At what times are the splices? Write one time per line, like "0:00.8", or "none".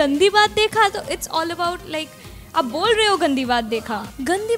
none